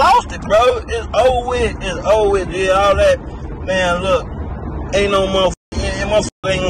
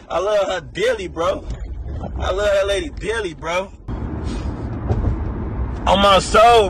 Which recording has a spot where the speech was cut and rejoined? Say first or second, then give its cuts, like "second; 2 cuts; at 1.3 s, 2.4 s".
second; 1 cut; at 3.9 s